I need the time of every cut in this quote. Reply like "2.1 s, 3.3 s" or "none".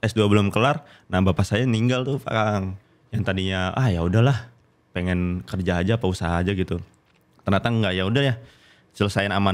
2.8 s

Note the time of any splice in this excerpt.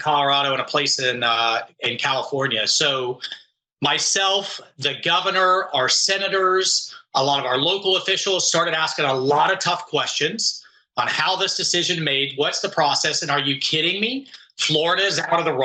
none

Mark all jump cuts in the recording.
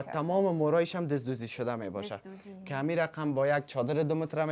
none

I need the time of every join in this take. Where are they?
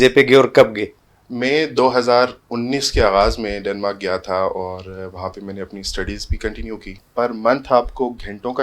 7.0 s

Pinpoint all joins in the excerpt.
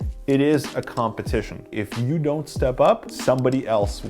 3.1 s

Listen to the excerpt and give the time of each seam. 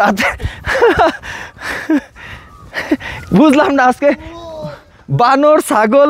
none

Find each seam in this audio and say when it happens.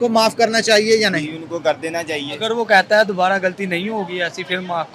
2.5 s

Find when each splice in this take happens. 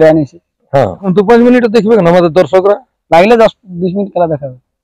1.1 s

